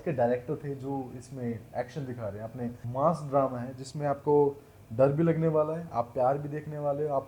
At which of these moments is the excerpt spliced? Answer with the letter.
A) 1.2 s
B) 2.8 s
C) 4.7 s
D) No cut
B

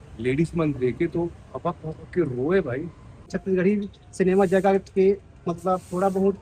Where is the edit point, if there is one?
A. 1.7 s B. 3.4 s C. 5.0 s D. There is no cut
B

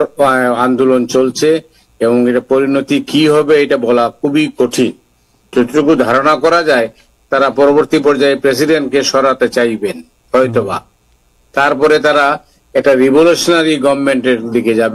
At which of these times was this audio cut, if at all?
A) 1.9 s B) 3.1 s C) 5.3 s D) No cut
C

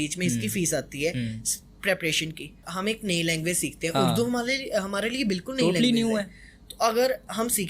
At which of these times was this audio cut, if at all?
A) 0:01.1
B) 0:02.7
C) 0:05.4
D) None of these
B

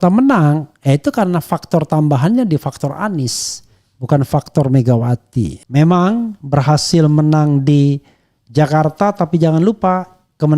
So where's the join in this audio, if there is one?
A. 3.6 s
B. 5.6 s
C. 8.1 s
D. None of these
B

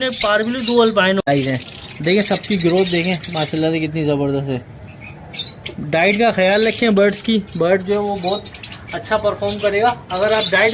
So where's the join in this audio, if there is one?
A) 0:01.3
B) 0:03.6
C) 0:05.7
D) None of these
A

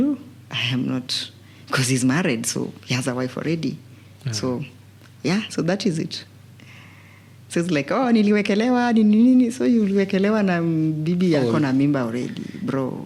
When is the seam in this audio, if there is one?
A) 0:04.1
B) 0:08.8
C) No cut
C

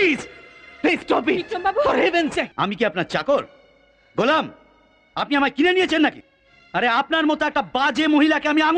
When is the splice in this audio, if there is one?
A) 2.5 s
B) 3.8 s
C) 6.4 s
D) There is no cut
A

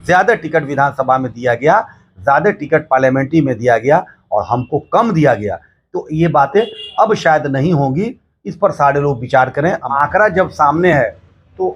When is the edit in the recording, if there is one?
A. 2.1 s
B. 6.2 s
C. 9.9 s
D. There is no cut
C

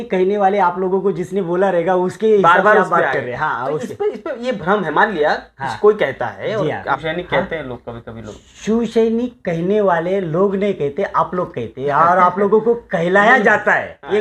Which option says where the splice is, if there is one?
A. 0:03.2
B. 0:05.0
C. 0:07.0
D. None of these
C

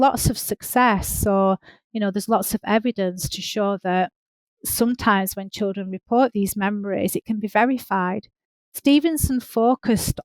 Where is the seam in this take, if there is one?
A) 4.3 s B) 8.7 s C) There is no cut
B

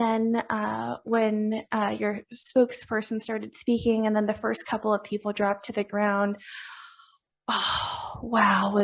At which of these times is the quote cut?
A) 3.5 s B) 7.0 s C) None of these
C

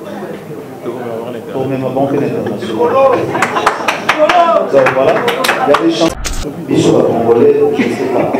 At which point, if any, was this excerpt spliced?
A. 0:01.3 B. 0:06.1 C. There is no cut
B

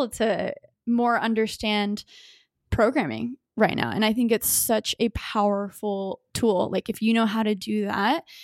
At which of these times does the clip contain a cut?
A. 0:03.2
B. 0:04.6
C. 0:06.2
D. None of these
D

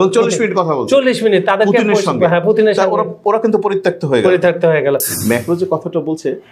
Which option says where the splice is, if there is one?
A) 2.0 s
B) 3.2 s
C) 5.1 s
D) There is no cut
C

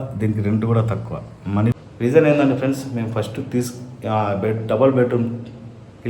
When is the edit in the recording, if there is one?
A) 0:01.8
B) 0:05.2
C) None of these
A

